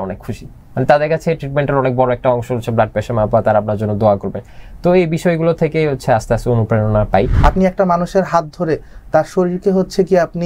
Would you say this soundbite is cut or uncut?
cut